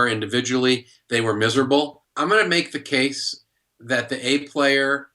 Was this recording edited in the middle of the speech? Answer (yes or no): yes